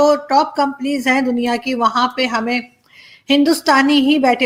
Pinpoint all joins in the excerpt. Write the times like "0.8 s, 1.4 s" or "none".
none